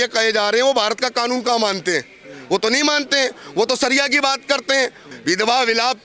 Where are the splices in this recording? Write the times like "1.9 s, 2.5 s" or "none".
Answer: 5.1 s